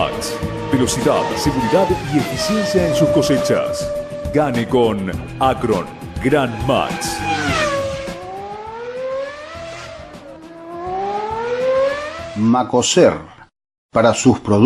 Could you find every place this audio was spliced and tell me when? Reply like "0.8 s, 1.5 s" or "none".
12.2 s